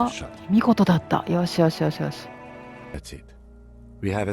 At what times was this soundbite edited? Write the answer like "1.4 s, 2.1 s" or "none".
2.9 s